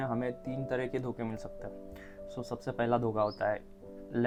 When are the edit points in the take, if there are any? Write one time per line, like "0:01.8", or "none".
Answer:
none